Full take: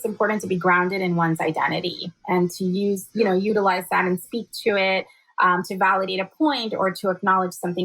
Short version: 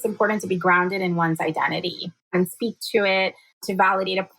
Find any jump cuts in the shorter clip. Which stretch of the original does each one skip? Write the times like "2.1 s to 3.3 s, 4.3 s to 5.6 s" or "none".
2.3 s to 4.0 s, 5.3 s to 5.6 s